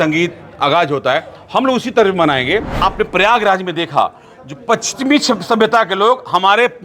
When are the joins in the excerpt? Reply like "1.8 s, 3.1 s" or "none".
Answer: 2.8 s